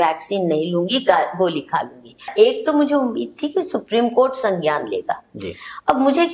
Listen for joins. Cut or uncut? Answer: cut